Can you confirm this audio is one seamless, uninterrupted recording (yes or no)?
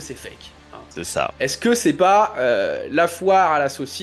yes